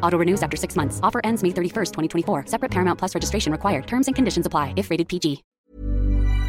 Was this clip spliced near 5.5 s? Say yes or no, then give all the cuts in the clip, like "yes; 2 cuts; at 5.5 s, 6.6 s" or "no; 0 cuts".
yes; 1 cut; at 5.5 s